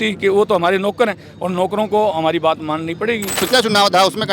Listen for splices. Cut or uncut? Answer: cut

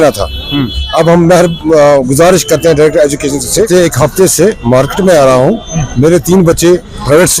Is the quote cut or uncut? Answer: cut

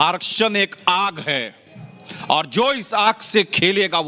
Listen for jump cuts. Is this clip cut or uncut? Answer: uncut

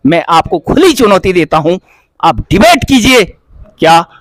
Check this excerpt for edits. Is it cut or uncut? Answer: uncut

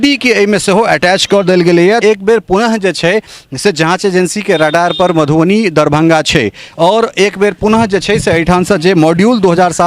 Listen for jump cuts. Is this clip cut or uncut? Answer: cut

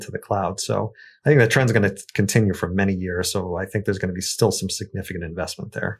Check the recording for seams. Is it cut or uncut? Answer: uncut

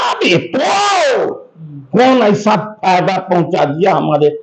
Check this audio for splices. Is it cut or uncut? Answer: uncut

